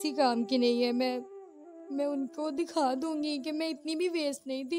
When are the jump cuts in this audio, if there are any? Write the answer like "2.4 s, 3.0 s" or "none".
none